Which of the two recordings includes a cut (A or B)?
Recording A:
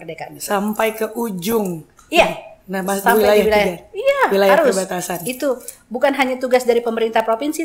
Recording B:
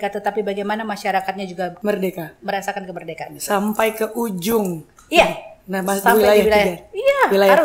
B